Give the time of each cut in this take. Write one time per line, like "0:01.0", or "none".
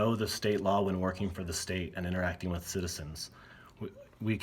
none